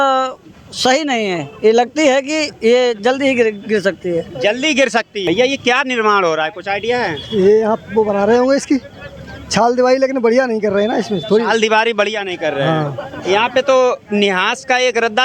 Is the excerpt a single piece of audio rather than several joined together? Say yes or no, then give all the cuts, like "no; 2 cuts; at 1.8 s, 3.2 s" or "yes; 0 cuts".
no; 1 cut; at 5.2 s